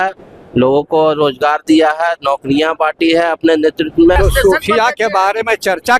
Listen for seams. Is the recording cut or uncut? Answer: cut